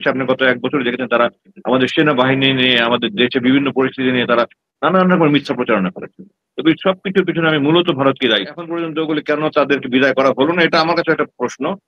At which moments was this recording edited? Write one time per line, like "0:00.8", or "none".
0:08.9